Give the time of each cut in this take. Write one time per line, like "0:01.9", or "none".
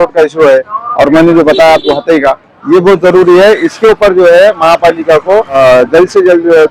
0:05.6